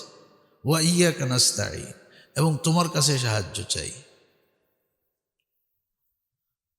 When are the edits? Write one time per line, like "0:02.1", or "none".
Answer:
none